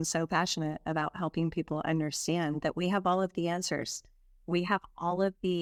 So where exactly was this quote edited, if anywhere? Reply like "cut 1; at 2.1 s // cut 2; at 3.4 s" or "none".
none

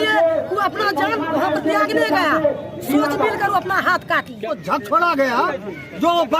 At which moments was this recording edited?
cut 1; at 4.3 s

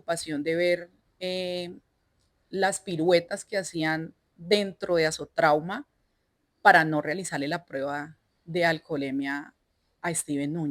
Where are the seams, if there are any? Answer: none

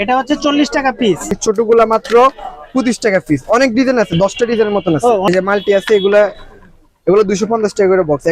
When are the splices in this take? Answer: cut 1; at 1.3 s // cut 2; at 5.2 s

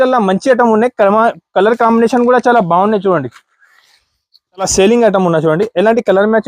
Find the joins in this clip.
cut 1; at 4.7 s

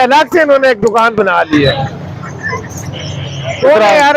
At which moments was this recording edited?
none

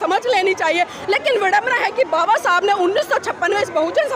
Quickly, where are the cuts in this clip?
none

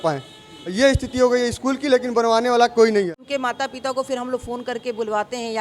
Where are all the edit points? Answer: cut 1; at 3.2 s

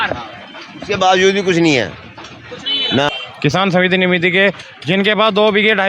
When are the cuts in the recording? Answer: cut 1; at 3.1 s

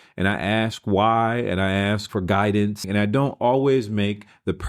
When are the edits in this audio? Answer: cut 1; at 2.1 s // cut 2; at 2.9 s

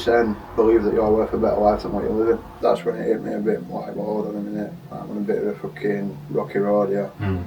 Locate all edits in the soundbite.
cut 1; at 2.5 s

